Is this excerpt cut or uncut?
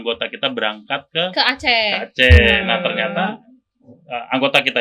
uncut